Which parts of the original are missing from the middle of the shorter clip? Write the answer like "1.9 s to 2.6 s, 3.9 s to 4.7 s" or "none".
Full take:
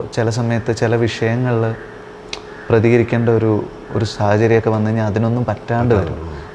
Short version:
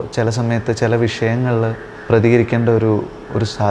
1.9 s to 2.5 s